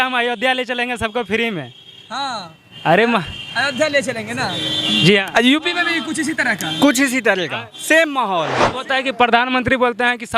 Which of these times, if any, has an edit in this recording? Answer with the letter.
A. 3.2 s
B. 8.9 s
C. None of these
B